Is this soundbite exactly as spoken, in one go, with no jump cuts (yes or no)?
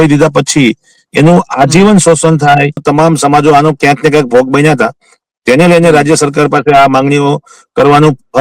no